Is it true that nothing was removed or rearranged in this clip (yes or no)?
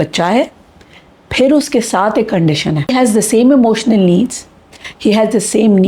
no